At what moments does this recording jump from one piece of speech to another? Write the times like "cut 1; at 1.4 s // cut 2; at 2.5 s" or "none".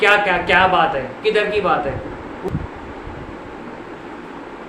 cut 1; at 2.5 s